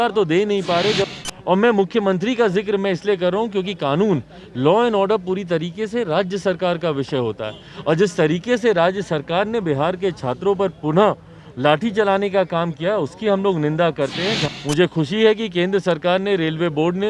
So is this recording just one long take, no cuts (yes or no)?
no